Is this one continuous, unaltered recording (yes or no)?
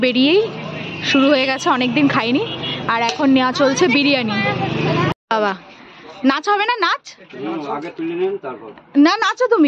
no